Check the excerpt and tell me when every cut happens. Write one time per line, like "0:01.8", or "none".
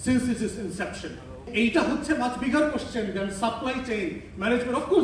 0:01.5